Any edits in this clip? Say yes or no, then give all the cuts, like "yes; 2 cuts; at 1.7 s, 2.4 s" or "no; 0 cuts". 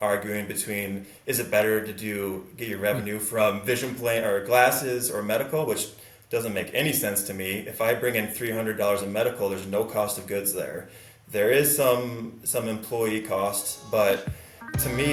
no; 0 cuts